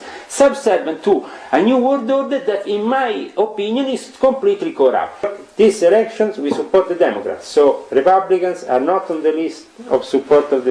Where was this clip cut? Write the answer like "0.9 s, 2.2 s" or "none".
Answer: 5.3 s

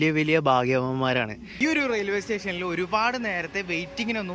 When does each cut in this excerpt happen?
1.4 s

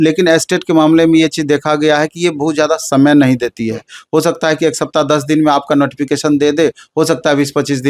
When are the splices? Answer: none

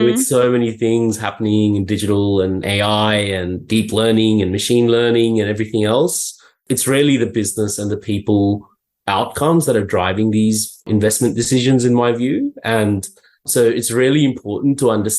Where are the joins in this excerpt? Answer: 2.6 s, 10.8 s

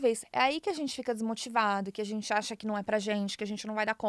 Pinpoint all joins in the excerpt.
none

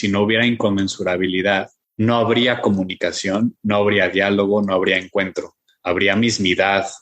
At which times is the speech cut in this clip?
1.8 s

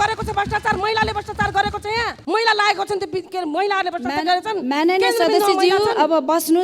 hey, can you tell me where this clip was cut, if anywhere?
2.2 s

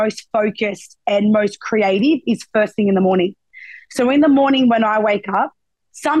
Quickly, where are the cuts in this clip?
none

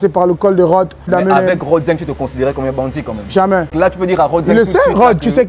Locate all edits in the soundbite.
1.1 s, 3.7 s

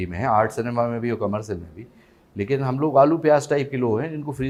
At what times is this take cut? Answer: none

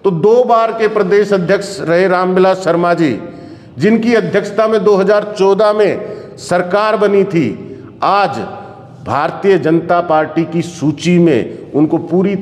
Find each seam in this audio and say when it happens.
none

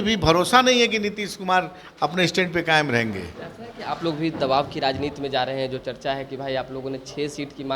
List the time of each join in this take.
none

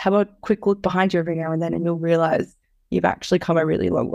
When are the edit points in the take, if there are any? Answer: none

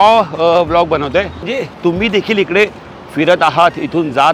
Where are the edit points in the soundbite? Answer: 1.5 s

